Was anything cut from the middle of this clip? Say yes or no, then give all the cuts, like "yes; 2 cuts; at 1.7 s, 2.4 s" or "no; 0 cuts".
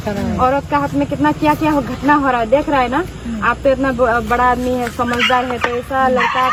no; 0 cuts